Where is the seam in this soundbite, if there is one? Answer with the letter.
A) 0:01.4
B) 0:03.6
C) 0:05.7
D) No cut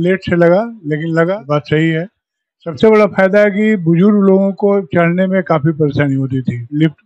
A